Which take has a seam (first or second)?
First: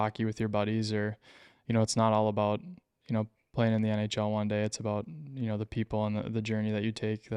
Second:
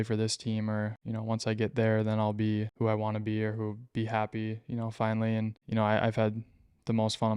second